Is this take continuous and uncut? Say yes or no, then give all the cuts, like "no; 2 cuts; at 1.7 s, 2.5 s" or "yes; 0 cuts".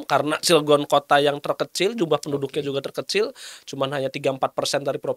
yes; 0 cuts